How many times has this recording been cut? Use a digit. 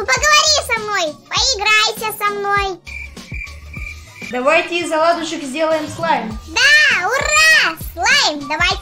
1